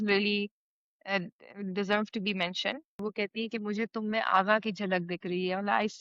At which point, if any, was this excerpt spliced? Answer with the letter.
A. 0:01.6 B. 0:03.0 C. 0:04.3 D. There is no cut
B